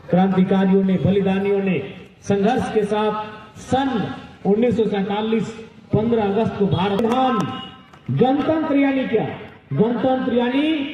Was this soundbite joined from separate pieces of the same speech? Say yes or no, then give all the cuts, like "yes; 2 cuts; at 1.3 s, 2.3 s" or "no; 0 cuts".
yes; 1 cut; at 7.0 s